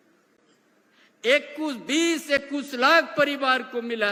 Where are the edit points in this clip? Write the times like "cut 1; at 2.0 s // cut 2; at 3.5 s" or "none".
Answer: none